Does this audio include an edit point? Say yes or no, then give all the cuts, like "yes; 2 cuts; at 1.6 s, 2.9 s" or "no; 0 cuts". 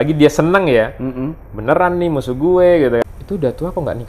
yes; 1 cut; at 3.0 s